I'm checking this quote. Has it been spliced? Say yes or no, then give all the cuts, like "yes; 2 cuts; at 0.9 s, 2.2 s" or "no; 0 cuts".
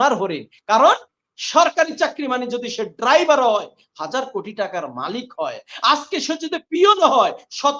no; 0 cuts